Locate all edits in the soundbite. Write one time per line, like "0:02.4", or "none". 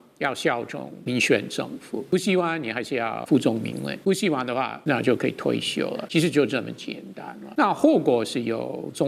0:00.9
0:02.1
0:03.2
0:03.9
0:04.8
0:06.0
0:07.5